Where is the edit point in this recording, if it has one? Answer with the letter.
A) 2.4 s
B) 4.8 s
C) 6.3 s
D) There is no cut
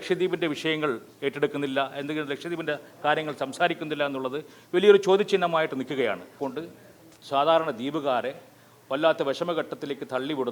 C